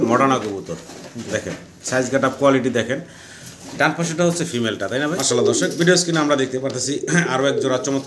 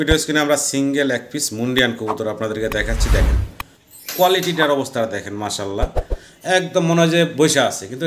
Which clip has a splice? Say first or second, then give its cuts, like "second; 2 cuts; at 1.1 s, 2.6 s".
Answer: first; 1 cut; at 5.2 s